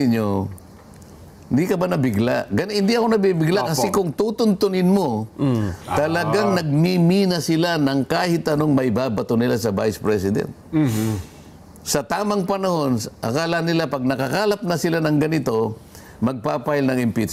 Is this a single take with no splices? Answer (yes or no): yes